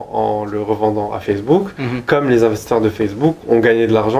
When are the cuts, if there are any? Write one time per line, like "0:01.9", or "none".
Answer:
none